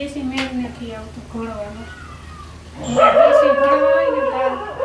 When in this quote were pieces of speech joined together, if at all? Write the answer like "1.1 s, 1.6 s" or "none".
none